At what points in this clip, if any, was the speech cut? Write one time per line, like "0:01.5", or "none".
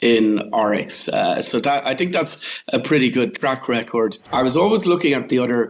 0:04.2